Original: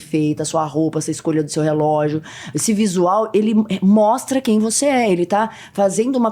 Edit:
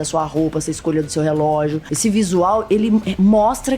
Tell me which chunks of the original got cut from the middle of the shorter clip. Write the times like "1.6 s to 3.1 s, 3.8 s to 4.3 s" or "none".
2.3 s to 2.5 s